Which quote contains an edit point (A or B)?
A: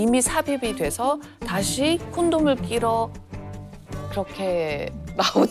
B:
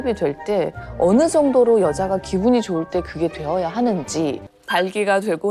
B